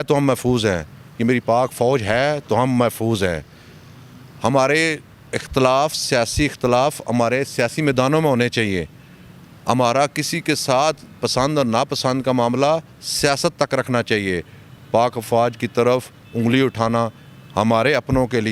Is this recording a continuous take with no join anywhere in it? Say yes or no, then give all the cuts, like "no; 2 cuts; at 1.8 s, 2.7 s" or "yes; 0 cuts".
yes; 0 cuts